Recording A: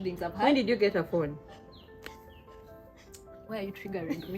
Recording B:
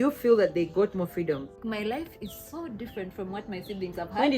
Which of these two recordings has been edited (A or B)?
B